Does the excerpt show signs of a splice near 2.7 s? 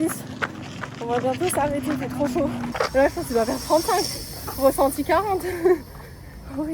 yes; 1 cut; at 2.7 s

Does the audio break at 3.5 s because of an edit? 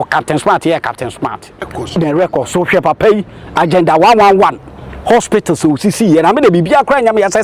no; 1 cut; at 1.6 s

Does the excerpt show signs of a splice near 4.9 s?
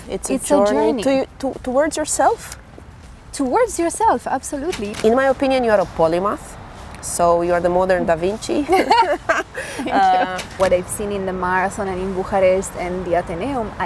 yes; 2 cuts; at 4.9 s, 10.5 s

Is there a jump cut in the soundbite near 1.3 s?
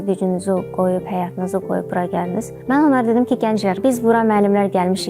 no; 2 cuts; at 2.5 s, 3.8 s

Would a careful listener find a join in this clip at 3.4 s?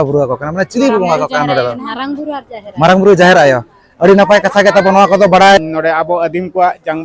no; 1 cut; at 5.6 s

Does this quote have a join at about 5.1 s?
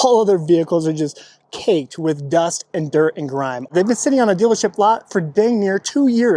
no; 1 cut; at 3.7 s

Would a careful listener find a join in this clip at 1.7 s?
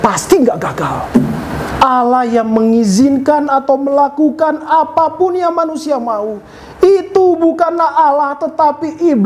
yes; 1 cut; at 1.7 s

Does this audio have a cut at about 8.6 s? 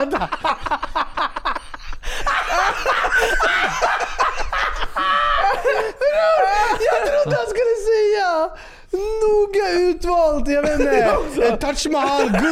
no; 0 cuts

